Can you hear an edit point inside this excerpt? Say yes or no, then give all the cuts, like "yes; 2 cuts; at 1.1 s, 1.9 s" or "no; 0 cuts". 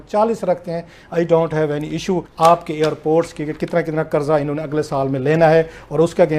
yes; 1 cut; at 2.3 s